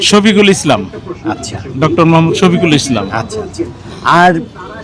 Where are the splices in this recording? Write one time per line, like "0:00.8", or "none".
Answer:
none